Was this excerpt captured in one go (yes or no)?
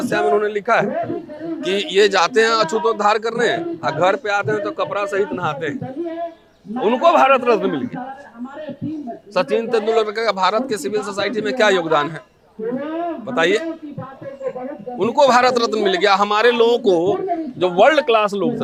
yes